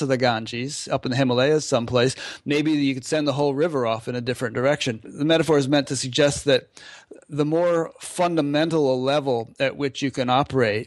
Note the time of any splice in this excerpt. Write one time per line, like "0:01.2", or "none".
0:05.1